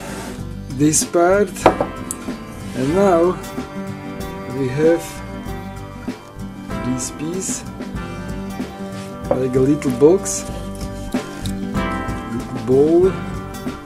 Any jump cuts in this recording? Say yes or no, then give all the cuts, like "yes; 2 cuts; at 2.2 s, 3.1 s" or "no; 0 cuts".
no; 0 cuts